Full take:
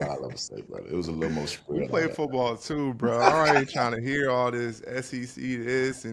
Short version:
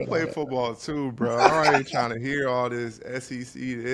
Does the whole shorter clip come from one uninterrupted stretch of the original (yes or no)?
yes